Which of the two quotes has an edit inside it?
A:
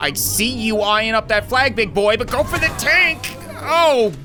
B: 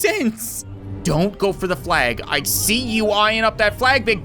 B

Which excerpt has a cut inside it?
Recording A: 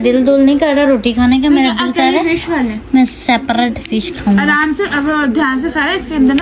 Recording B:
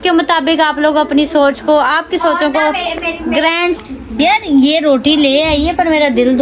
B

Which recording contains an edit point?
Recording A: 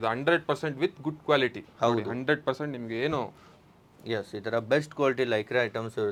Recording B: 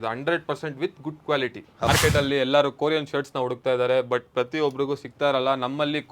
B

